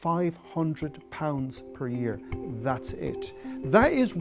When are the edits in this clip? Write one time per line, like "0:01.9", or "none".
none